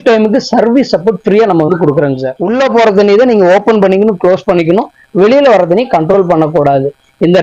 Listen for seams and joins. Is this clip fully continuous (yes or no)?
no